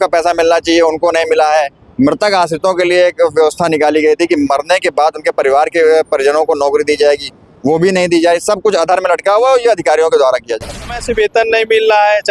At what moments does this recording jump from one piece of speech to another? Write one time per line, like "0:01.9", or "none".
0:10.9